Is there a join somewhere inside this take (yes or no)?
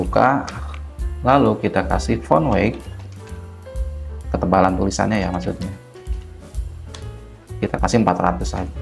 no